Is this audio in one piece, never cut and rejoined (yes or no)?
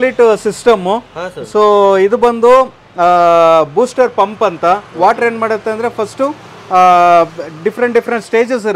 yes